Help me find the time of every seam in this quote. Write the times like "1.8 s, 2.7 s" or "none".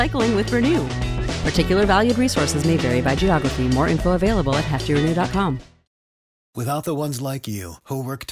5.9 s